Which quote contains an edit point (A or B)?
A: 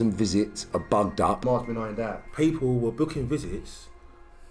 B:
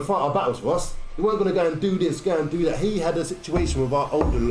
A